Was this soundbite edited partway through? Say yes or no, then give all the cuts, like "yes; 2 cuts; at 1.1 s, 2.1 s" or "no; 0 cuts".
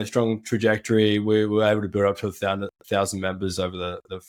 no; 0 cuts